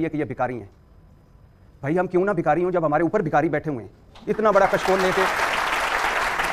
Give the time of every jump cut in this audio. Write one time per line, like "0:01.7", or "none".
none